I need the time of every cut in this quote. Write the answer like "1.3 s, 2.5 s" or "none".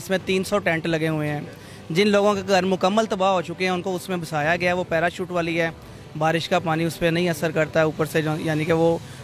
none